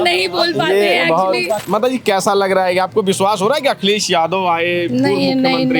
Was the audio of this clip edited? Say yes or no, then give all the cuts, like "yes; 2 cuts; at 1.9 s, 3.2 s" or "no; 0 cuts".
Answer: yes; 1 cut; at 1.6 s